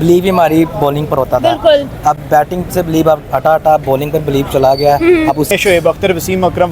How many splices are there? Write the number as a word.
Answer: one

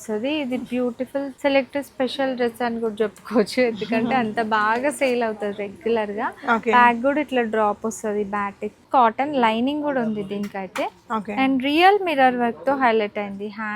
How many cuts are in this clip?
two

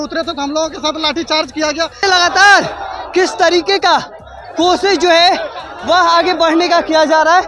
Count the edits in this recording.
one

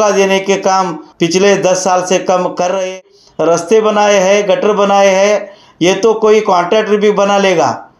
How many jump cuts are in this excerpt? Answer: one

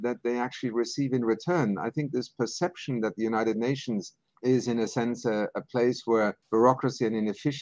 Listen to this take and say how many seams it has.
one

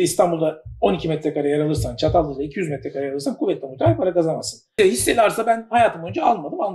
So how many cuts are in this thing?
one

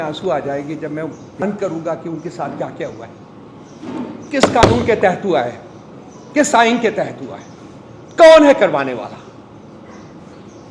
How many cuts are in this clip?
one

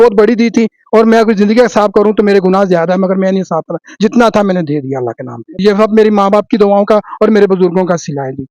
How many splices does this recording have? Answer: one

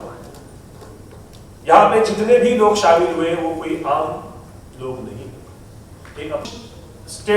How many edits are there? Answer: one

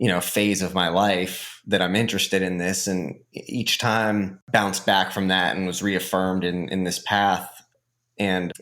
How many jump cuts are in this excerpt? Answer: one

